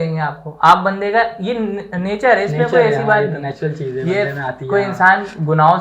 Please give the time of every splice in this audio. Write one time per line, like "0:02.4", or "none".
none